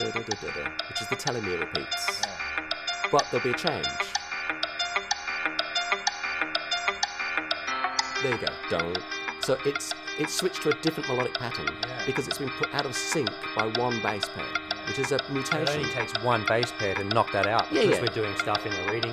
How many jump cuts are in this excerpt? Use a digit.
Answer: 0